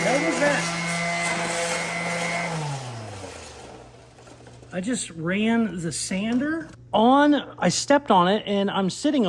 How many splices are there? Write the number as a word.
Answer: zero